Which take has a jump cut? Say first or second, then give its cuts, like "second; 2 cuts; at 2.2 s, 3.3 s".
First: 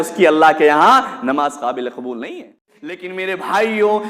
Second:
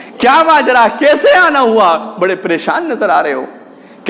first; 1 cut; at 3.1 s